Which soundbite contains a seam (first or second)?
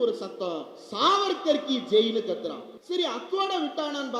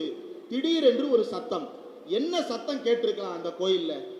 first